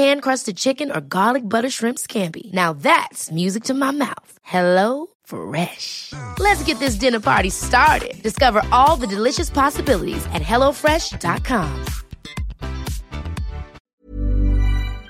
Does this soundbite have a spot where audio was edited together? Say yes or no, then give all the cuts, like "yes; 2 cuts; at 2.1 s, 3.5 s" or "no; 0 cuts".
yes; 1 cut; at 13.8 s